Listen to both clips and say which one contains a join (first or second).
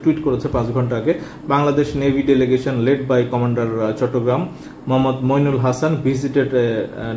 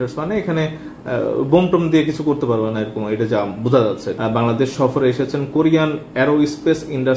second